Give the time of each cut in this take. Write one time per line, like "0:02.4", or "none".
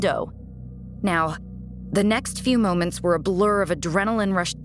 none